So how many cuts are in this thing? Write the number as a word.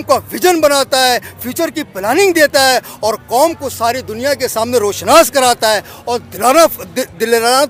zero